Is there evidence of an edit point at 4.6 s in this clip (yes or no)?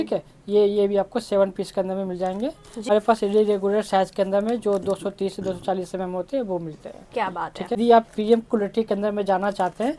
no